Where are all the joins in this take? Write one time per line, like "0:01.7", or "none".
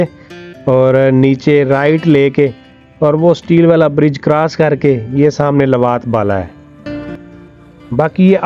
0:06.8